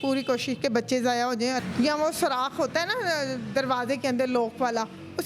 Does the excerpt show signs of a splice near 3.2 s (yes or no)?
no